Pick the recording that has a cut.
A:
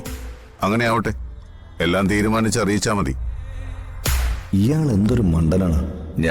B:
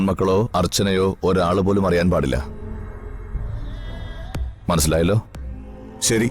A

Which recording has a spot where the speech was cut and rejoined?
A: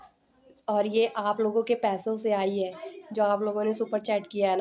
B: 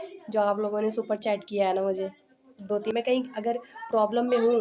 B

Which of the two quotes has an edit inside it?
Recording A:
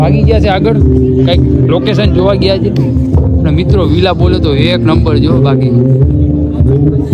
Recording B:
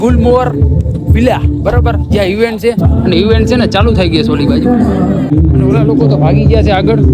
B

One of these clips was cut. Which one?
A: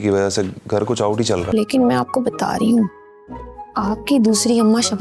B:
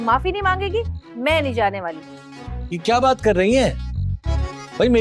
A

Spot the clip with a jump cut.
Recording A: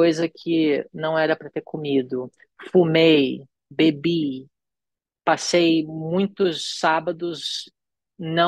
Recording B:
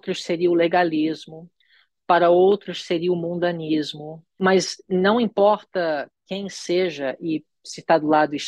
B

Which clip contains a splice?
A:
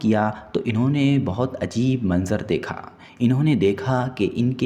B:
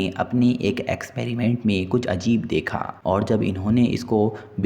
B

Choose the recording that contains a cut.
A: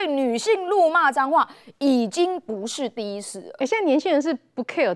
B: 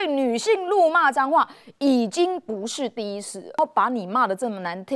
B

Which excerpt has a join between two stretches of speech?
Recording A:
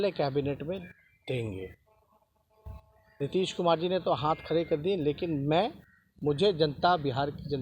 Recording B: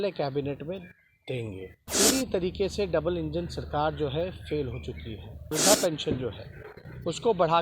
B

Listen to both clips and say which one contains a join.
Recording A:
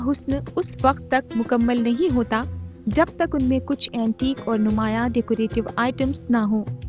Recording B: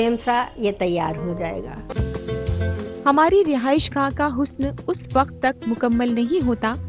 B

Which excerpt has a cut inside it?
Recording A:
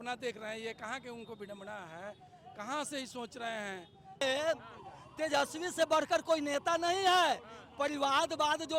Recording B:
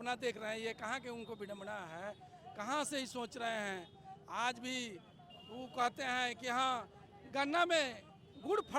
A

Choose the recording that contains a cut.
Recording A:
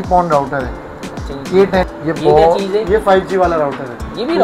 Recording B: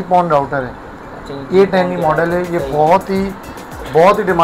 A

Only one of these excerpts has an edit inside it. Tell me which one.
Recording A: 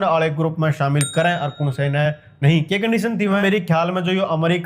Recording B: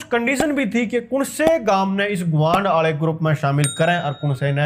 A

